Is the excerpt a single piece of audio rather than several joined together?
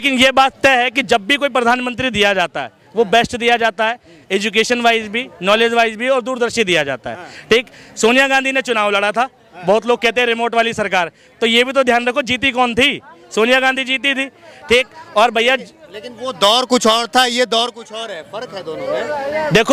yes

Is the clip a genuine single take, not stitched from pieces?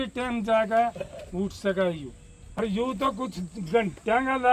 no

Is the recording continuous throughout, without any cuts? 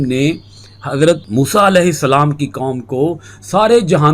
no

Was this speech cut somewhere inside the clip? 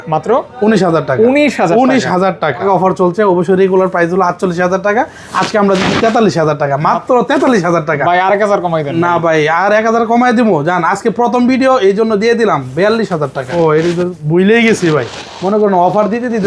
yes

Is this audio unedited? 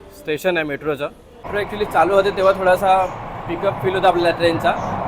no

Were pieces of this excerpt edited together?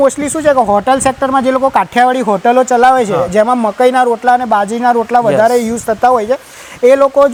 no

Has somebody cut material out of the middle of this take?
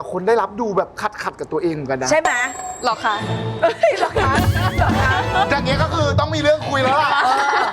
no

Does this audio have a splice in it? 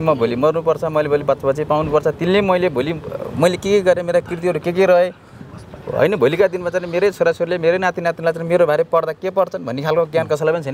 no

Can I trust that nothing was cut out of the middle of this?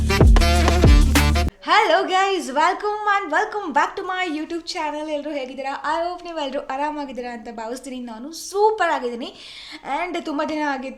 no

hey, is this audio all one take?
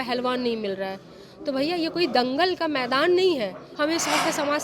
no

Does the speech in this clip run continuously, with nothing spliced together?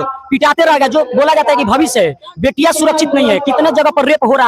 yes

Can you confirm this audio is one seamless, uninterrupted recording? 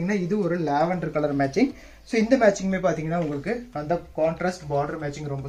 yes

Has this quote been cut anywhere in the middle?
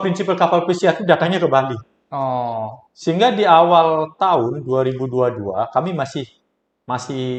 no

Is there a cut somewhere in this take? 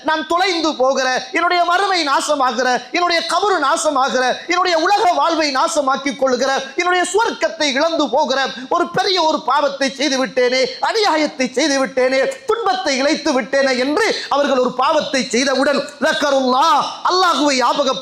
no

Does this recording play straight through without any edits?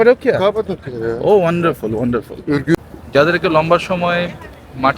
no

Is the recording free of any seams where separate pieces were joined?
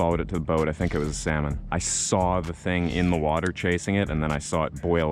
no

